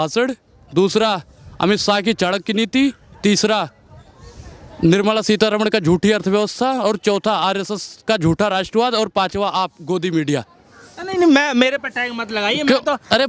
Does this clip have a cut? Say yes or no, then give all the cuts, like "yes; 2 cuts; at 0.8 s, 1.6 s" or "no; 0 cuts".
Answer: no; 0 cuts